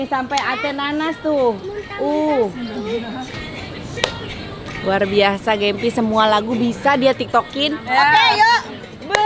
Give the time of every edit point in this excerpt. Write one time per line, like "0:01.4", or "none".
0:03.3